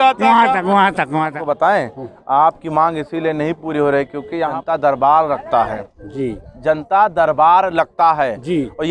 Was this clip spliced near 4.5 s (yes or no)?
yes